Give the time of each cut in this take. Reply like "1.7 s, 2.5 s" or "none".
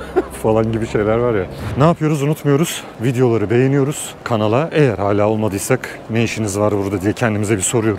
1.6 s